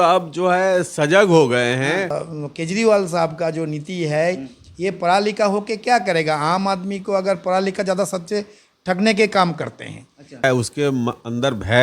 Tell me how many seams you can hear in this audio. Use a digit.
2